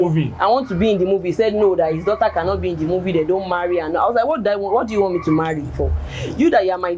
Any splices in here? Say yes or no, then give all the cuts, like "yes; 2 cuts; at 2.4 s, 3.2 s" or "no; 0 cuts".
no; 0 cuts